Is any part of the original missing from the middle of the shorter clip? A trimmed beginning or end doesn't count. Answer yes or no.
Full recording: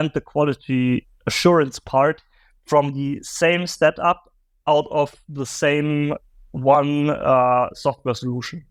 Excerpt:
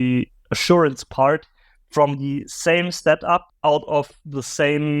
yes